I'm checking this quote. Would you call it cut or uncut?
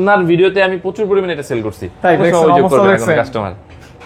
cut